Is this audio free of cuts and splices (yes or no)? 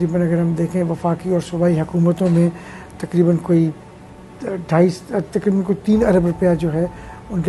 yes